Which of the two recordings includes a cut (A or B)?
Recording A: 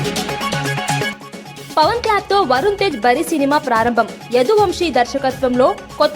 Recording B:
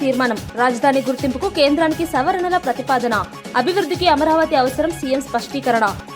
A